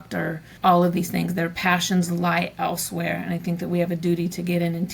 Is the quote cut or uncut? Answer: uncut